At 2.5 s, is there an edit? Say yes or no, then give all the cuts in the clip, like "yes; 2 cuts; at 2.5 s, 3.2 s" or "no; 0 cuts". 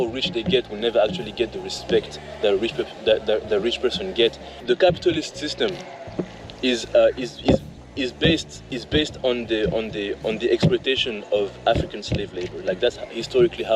no; 1 cut; at 4.5 s